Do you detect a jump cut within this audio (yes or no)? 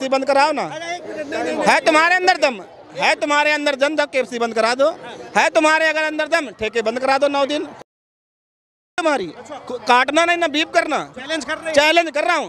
no